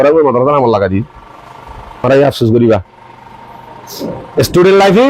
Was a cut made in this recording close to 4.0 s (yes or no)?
no